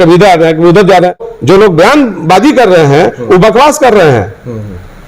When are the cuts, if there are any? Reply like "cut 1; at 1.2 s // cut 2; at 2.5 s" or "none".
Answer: cut 1; at 1.3 s